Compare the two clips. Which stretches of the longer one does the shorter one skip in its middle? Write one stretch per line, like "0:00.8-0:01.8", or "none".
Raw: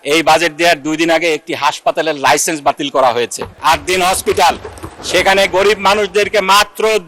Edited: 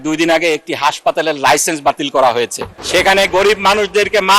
0:03.4-0:04.8